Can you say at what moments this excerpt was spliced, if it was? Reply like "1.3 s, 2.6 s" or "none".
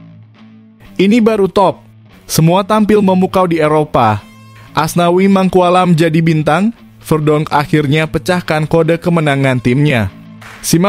1.0 s